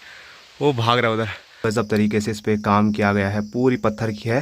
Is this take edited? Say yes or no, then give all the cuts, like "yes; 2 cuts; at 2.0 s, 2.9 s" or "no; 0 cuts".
yes; 1 cut; at 1.5 s